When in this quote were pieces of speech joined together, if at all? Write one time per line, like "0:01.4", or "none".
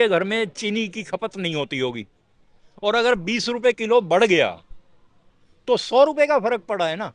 none